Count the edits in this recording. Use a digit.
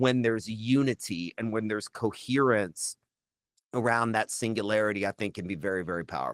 0